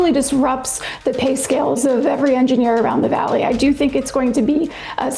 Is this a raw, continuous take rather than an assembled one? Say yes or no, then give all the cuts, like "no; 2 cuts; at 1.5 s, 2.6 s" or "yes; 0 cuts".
yes; 0 cuts